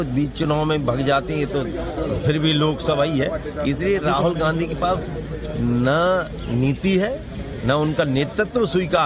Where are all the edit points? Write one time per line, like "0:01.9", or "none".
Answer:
none